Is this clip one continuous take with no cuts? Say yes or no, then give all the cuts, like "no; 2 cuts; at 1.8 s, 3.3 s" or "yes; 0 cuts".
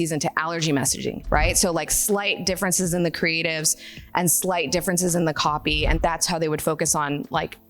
no; 1 cut; at 6.0 s